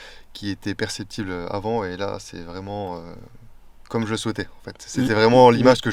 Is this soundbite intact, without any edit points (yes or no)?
yes